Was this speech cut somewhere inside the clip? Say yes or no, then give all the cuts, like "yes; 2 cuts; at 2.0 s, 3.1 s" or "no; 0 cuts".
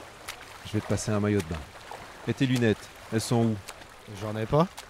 no; 0 cuts